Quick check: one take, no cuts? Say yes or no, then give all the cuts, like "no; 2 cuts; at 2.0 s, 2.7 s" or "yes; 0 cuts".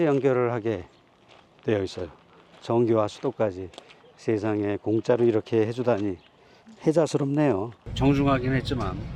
no; 1 cut; at 7.8 s